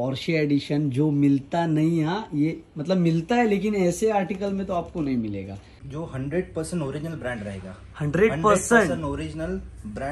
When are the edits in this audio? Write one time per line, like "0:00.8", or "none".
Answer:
0:05.8